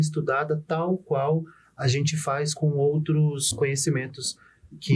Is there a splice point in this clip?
yes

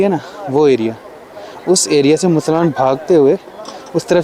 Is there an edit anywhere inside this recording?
no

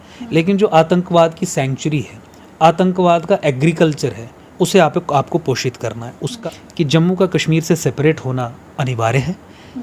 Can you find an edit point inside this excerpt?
yes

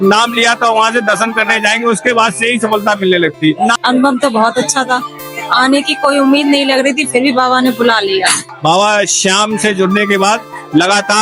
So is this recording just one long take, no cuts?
no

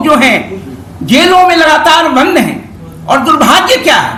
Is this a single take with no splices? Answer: yes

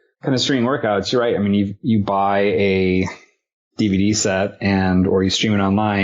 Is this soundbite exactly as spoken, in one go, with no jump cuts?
no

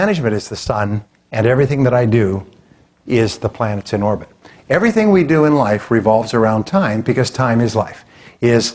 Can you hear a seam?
no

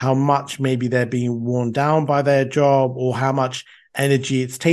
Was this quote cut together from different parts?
no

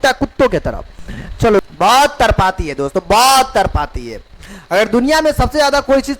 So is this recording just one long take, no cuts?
no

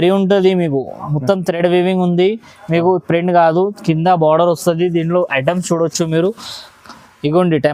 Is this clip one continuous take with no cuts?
yes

